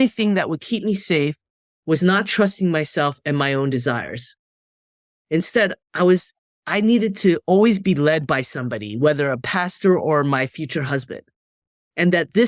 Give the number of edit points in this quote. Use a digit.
0